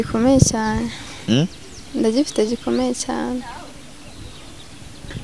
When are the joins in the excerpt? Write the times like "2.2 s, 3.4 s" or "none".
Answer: none